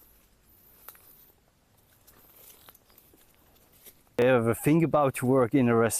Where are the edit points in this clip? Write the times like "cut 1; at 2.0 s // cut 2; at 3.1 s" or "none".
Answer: cut 1; at 4.2 s